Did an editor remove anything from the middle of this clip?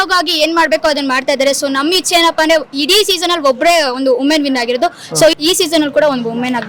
yes; 1 cut; at 5.4 s

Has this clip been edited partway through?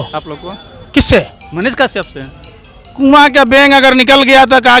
no; 0 cuts

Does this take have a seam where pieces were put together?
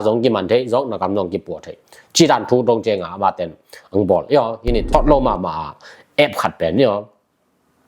yes; 1 cut; at 4.9 s

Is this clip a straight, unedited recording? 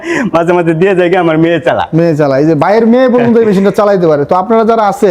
yes; 0 cuts

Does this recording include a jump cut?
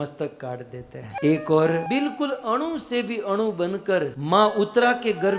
yes; 3 cuts; at 1.1 s, 1.9 s, 4.2 s

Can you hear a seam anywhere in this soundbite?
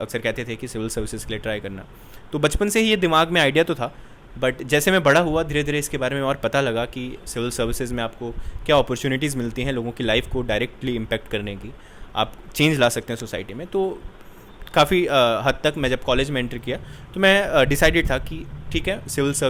no; 0 cuts

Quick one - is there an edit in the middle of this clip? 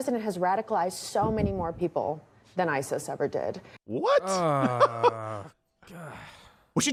no; 0 cuts

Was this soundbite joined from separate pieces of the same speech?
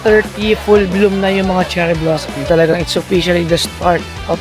yes; 1 cut; at 2.5 s

